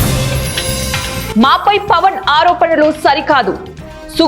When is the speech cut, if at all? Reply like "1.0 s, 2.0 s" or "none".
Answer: none

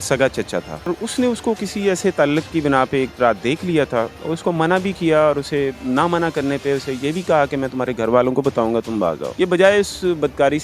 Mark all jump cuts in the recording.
0.9 s, 9.2 s

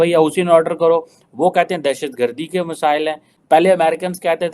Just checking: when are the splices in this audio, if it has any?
3.4 s

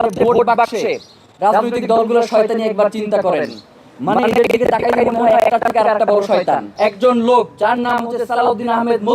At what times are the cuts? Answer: 6.7 s

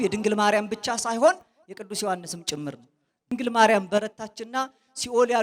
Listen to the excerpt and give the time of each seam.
3.3 s

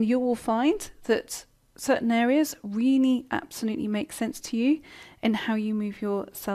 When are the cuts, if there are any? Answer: 5.4 s

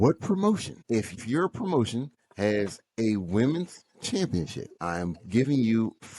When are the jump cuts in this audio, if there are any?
1.0 s

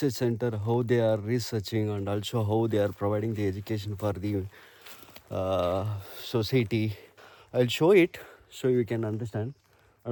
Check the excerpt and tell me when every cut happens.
none

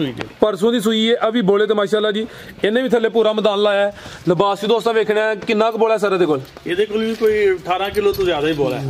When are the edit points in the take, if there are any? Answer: none

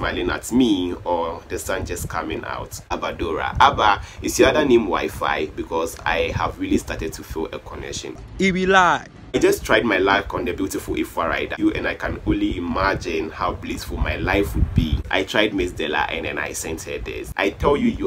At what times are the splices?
3.0 s, 9.4 s, 11.5 s, 15.0 s

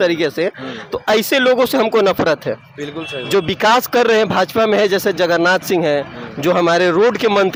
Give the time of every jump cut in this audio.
none

